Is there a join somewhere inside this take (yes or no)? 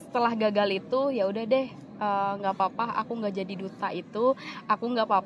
no